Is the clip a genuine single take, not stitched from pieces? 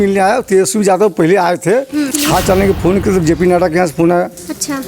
no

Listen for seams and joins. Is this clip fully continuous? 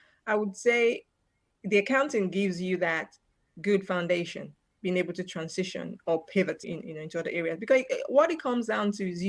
yes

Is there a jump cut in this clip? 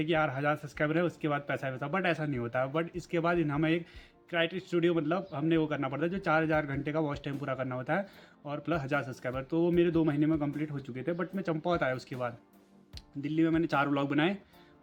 no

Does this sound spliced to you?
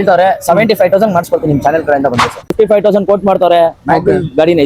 yes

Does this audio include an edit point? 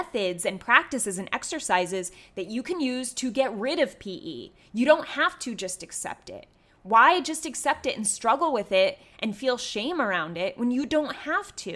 no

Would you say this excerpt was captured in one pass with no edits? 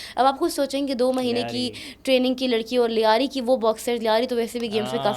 yes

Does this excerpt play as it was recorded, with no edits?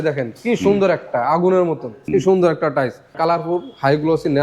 no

